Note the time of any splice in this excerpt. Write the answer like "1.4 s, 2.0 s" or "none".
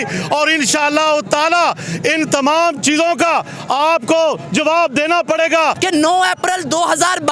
5.8 s